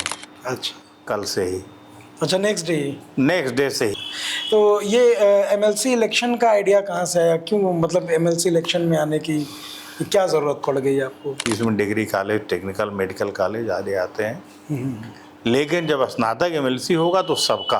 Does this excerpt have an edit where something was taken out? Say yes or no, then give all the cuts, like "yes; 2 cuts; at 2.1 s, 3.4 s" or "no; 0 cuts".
yes; 2 cuts; at 3.9 s, 11.4 s